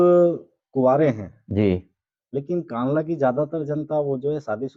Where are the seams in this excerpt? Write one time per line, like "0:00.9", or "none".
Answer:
none